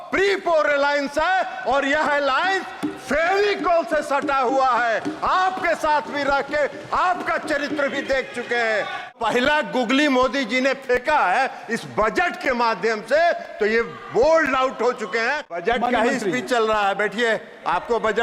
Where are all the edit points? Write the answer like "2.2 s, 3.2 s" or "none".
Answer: 9.2 s, 15.6 s